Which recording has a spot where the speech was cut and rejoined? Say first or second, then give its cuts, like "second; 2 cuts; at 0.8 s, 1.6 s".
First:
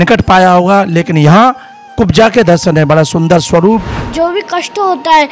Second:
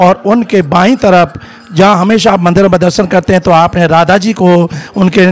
first; 1 cut; at 4.0 s